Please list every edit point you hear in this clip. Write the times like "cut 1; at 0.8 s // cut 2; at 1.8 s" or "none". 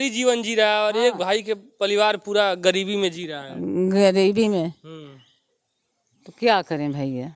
none